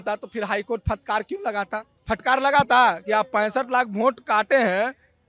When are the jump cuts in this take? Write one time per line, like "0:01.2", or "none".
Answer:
none